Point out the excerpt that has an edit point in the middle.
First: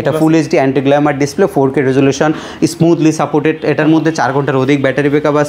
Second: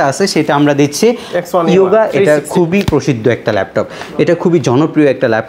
second; 1 cut; at 1.3 s

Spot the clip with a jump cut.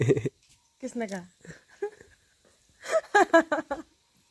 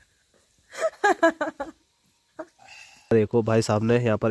second; 1 cut; at 3.1 s

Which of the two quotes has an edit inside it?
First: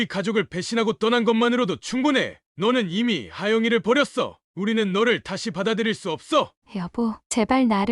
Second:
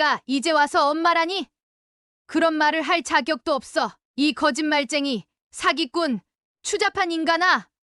first; 1 cut; at 6.6 s

